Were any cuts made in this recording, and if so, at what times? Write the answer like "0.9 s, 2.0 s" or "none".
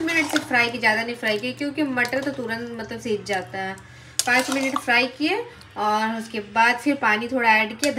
none